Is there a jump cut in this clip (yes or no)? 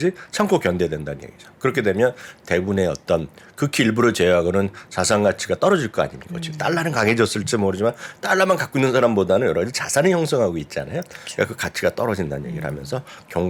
no